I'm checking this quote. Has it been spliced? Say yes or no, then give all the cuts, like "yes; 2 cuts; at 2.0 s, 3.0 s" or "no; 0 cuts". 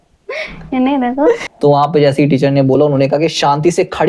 yes; 1 cut; at 1.4 s